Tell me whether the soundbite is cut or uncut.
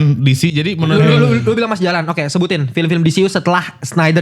cut